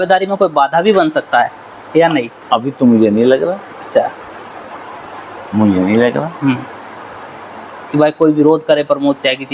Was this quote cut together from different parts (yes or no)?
no